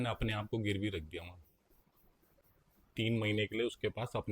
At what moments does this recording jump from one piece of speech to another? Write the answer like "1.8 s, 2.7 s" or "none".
2.4 s